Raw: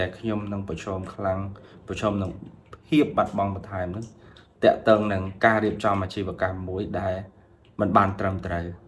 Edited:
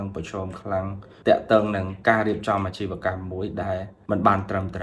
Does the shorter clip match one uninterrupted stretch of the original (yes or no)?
no